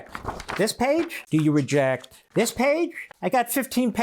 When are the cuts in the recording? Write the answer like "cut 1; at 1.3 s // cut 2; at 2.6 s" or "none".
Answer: cut 1; at 1.2 s // cut 2; at 2.1 s // cut 3; at 3.1 s